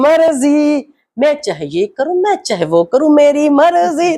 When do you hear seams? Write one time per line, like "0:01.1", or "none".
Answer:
none